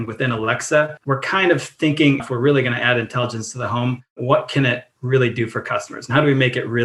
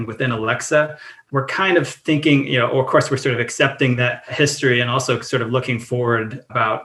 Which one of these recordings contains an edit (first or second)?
first